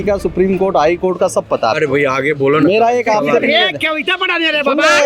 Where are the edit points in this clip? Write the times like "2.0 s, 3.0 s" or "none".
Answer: none

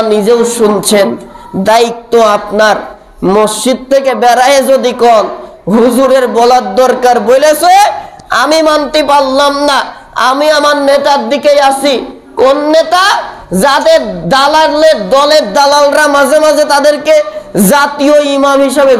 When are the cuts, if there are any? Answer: none

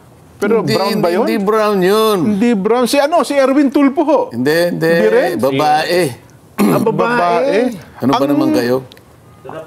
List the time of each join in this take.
none

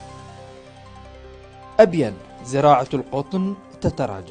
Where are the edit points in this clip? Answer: 1.8 s

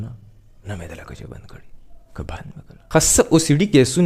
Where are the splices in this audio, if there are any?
2.9 s

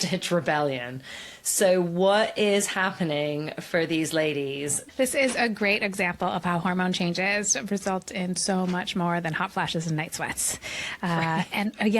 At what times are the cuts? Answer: 4.8 s

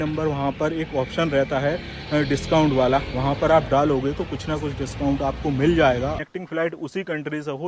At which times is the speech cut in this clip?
6.2 s

